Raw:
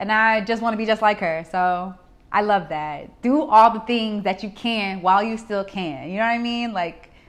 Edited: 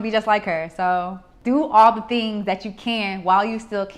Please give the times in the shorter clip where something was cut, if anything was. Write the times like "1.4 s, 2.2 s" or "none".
1.3 s

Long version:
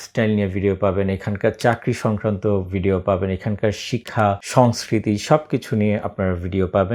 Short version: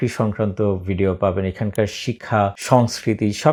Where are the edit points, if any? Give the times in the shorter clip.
none

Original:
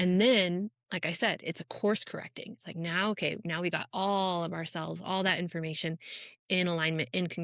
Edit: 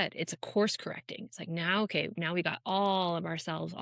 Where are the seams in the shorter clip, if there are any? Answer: none

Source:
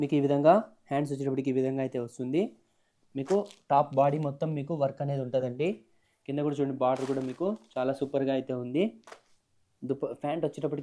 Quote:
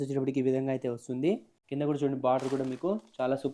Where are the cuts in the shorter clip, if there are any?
1.6 s

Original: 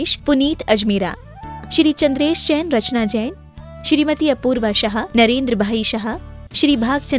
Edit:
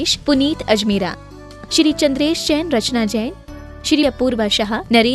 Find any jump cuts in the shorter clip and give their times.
4.0 s

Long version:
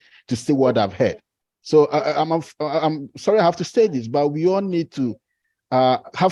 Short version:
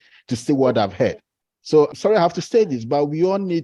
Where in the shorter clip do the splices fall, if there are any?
1.9 s

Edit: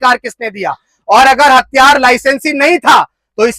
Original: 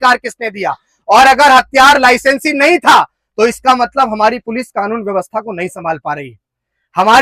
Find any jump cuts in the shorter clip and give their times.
none

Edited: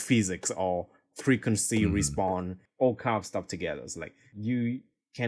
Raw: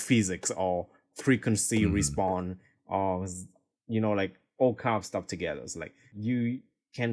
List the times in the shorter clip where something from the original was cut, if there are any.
2.6 s

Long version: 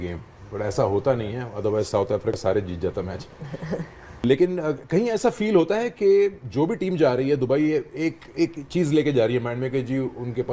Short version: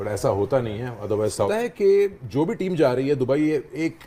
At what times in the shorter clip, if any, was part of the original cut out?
1.5 s

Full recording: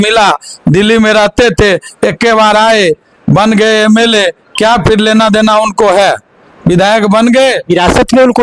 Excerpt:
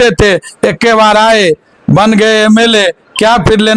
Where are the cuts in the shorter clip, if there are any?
none

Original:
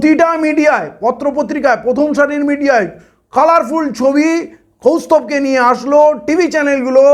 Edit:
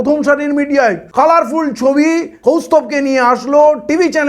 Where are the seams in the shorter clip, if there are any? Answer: 1.0 s, 2.3 s

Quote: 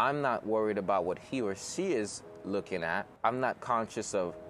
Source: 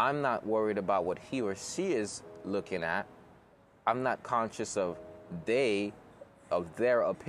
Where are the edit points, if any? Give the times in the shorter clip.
3.1 s

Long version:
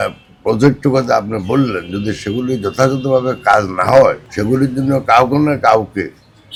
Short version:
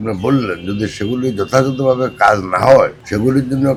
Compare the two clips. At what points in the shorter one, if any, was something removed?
none

